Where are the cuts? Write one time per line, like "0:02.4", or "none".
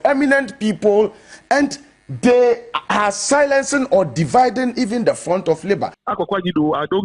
0:06.0